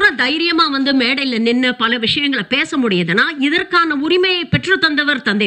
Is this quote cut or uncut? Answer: uncut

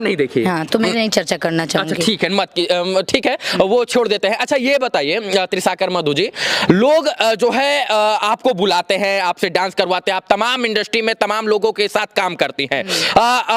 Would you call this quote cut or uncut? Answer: uncut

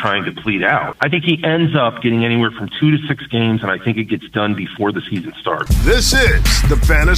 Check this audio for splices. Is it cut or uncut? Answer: cut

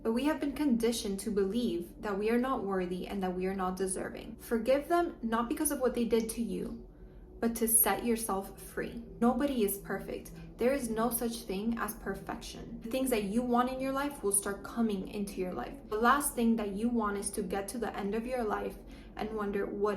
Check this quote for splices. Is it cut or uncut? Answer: cut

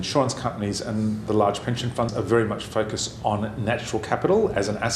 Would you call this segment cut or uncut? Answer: cut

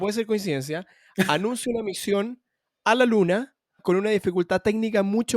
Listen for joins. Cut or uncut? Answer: cut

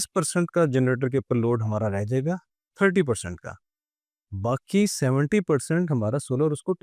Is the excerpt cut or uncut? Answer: uncut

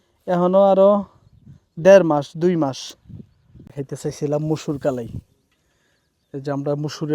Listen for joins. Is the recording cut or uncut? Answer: cut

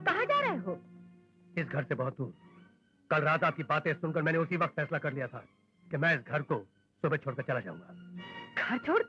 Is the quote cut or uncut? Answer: uncut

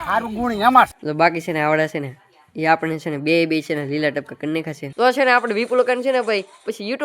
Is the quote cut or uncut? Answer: cut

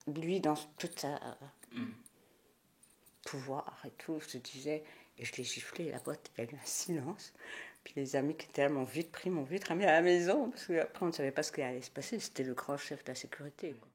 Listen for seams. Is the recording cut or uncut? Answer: uncut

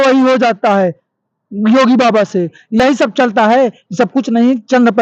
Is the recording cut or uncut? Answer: uncut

